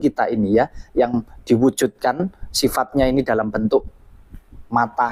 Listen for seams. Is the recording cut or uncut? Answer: uncut